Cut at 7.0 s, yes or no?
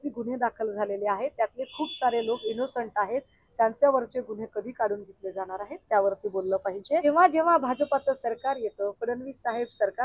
yes